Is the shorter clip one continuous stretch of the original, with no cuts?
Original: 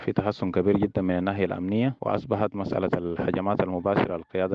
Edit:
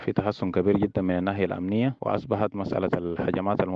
yes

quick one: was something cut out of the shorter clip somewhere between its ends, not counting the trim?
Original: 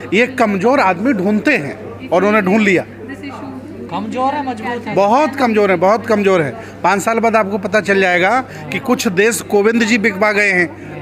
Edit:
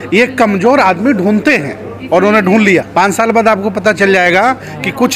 yes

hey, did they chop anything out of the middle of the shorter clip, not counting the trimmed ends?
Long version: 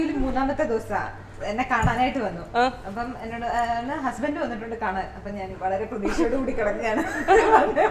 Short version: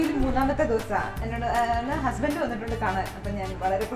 yes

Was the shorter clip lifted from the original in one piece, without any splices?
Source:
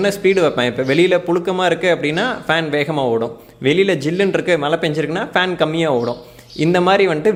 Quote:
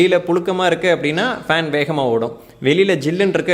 yes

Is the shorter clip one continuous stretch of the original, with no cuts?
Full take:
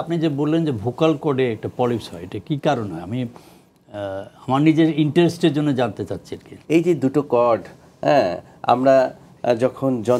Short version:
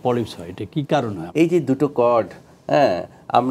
no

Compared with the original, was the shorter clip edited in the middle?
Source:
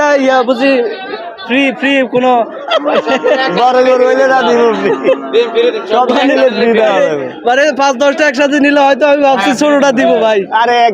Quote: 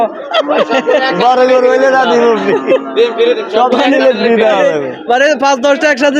no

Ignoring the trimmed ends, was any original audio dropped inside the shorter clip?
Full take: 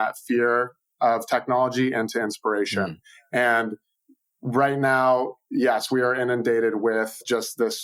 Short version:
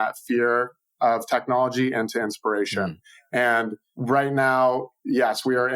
yes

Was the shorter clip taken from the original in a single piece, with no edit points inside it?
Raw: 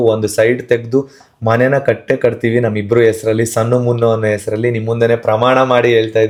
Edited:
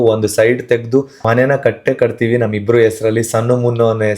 no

